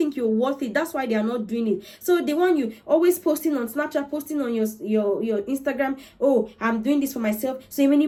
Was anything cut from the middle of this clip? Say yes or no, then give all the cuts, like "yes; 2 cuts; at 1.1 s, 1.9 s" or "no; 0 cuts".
no; 0 cuts